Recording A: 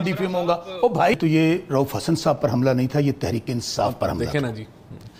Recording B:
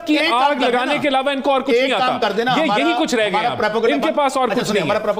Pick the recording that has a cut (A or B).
A